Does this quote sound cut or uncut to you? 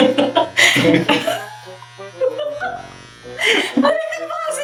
uncut